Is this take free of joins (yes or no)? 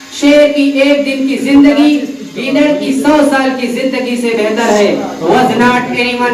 yes